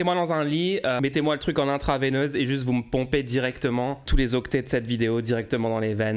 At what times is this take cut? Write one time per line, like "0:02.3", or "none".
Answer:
0:01.0